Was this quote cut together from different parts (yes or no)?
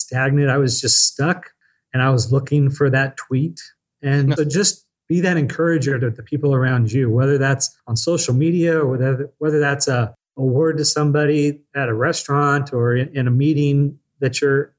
no